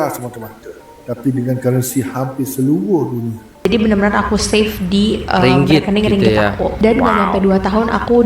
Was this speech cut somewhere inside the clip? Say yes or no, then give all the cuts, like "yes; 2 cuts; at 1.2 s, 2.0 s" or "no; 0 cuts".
yes; 1 cut; at 3.7 s